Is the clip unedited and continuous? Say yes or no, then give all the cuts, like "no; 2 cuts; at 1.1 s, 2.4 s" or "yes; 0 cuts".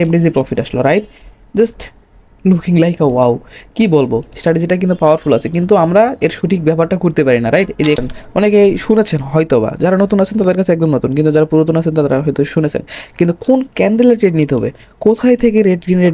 no; 1 cut; at 8.0 s